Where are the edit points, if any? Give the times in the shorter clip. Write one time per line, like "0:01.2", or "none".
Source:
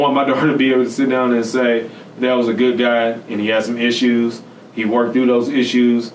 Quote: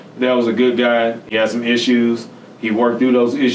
0:01.3